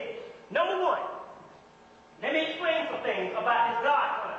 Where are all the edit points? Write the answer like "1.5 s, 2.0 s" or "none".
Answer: none